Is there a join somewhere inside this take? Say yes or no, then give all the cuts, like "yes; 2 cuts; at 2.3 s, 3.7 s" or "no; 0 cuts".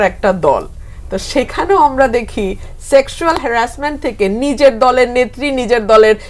no; 0 cuts